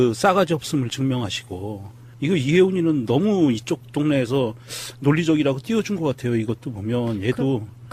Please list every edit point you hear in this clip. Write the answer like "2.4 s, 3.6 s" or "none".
none